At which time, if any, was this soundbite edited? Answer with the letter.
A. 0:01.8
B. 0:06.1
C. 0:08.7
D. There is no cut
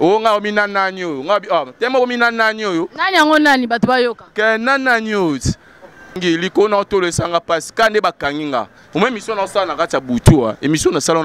B